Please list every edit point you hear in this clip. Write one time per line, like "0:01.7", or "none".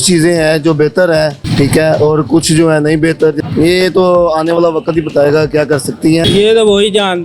0:03.4
0:06.2